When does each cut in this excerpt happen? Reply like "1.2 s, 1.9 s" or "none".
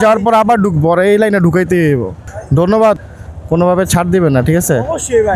none